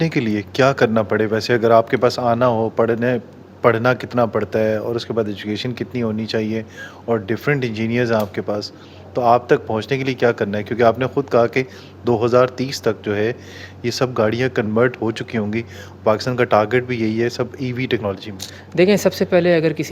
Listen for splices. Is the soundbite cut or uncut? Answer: uncut